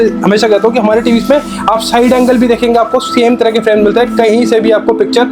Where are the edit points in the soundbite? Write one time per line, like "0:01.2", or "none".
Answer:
none